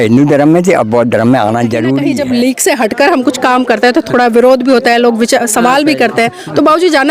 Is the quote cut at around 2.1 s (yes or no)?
yes